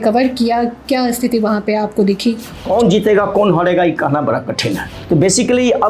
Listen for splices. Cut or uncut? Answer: cut